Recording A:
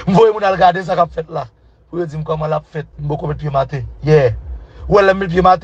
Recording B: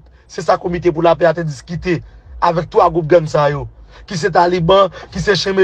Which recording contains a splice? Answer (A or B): A